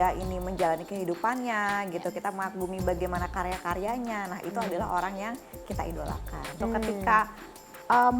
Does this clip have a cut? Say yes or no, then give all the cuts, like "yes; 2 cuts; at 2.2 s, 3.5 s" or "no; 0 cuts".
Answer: yes; 1 cut; at 6.6 s